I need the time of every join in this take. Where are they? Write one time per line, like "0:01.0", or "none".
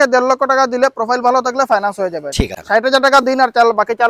0:02.6